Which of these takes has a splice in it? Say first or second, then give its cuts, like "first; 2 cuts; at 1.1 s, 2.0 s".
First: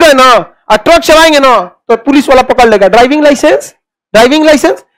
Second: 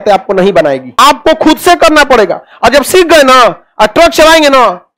second; 1 cut; at 1.0 s